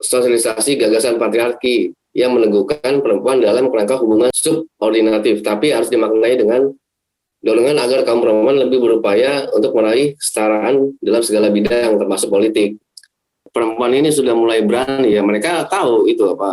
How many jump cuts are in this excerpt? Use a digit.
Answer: 2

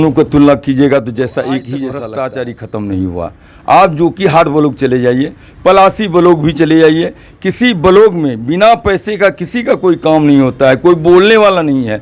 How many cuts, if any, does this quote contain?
1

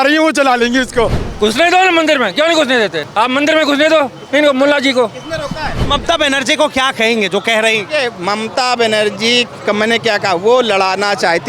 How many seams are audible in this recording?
4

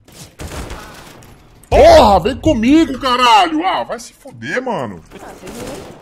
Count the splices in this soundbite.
1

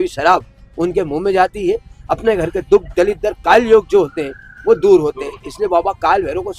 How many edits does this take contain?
0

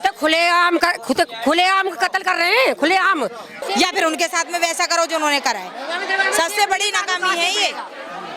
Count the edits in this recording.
1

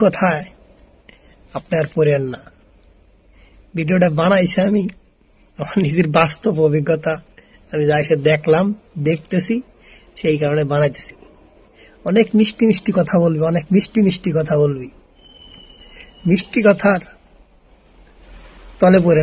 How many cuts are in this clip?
0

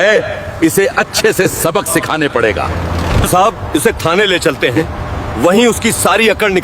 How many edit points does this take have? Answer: 1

